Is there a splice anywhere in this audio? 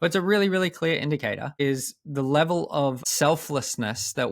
yes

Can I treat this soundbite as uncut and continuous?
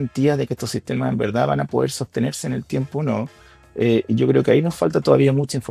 yes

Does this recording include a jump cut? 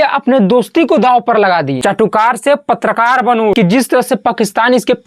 yes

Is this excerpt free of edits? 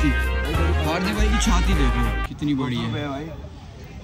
yes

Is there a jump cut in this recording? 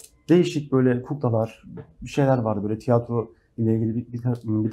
no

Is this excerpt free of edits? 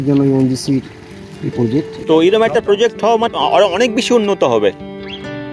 no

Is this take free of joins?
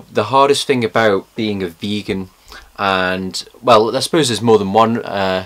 no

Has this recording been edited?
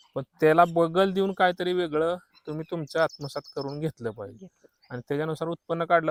no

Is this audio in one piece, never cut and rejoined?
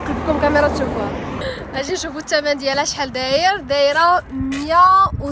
no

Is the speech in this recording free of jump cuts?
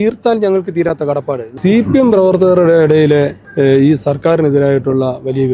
no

